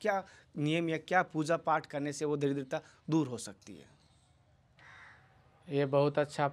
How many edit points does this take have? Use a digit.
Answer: 1